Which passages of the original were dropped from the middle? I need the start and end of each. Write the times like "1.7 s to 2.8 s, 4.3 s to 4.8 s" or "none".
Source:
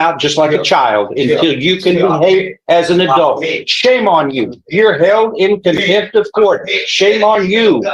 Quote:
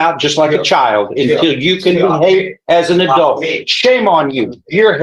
none